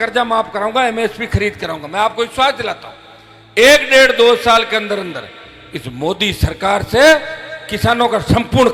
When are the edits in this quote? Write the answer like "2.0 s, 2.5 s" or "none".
none